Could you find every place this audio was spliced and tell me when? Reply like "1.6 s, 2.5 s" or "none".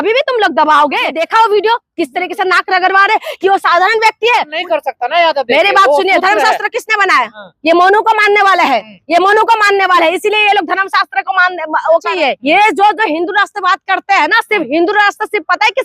1.2 s, 4.5 s, 12.1 s